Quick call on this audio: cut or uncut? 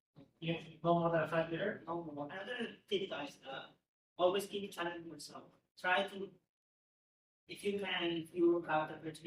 cut